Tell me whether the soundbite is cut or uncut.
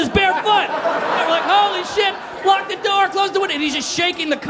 cut